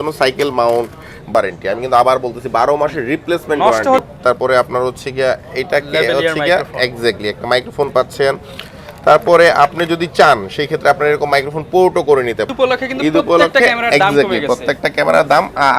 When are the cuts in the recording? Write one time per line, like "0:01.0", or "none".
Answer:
0:01.3
0:04.0
0:12.5